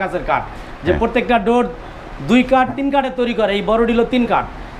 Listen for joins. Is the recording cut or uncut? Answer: uncut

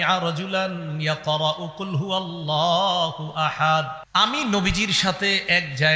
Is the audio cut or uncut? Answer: cut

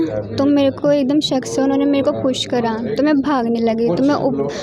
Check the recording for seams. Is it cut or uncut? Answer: uncut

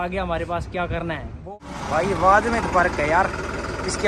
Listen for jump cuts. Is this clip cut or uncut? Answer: cut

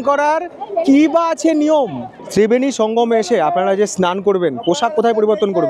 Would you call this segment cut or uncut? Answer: uncut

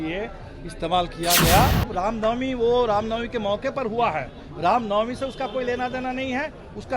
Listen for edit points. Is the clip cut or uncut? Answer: cut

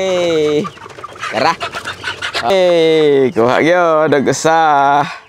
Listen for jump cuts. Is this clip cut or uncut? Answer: cut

